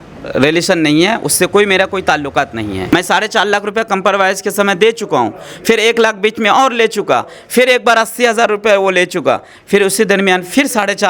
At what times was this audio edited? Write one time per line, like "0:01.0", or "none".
0:02.9